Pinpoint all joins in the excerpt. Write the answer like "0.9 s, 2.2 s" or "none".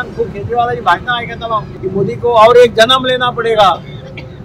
1.7 s